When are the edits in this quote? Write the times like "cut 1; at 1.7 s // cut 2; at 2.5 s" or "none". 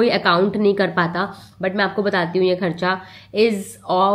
none